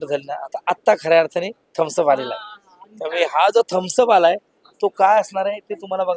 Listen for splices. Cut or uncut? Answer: uncut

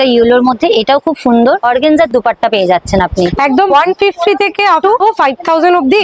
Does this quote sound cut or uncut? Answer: cut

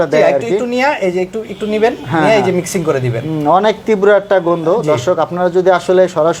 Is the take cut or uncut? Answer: uncut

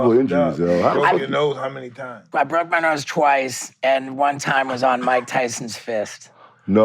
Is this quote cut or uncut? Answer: cut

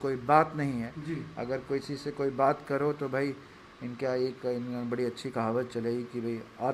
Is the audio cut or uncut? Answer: uncut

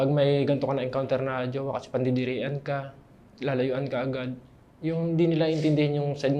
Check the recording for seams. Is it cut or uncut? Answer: uncut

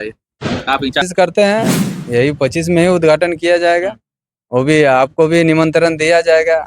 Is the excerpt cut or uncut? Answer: cut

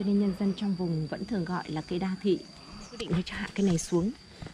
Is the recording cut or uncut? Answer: cut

